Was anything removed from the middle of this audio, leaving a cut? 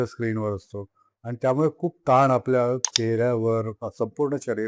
yes; 2 cuts; at 2.9 s, 3.8 s

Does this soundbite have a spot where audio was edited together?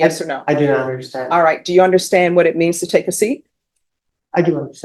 no; 0 cuts

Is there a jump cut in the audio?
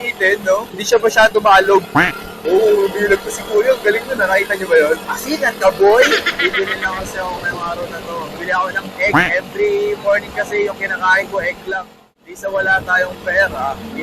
no; 0 cuts

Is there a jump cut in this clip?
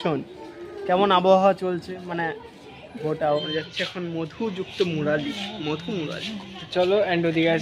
yes; 1 cut; at 3.4 s

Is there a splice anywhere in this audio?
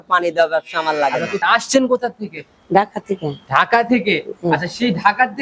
yes; 1 cut; at 1.3 s

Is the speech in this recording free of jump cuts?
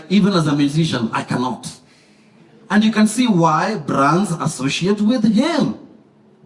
yes; 0 cuts

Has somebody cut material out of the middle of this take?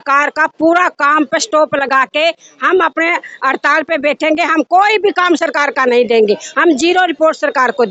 no; 0 cuts

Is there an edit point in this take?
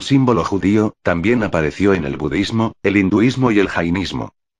no; 0 cuts

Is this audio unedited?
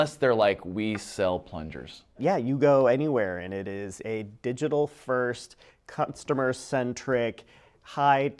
no; 1 cut; at 2.2 s

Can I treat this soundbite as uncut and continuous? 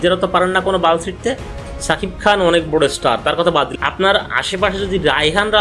no; 2 cuts; at 1.5 s, 3.7 s

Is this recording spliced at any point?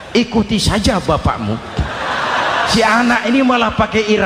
yes; 1 cut; at 2.7 s

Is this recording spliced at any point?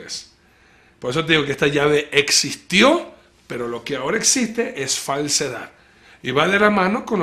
yes; 1 cut; at 1.3 s

